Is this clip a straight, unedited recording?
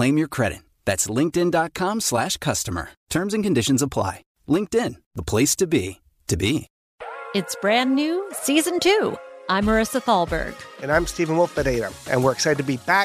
no; 1 cut; at 6.7 s

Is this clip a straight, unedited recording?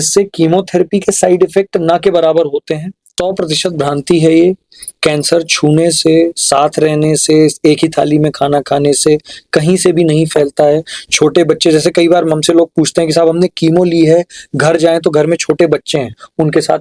no; 1 cut; at 3.0 s

